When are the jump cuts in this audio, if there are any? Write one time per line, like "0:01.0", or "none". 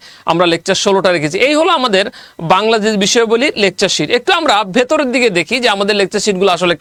none